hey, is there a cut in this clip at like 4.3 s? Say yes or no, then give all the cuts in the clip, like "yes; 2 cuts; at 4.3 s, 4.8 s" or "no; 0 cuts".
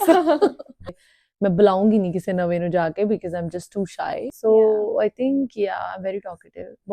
yes; 2 cuts; at 0.9 s, 4.3 s